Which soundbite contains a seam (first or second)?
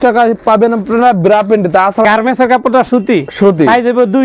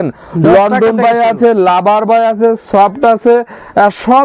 first